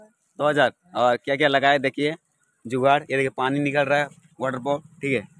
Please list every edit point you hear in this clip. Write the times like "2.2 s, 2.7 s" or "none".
none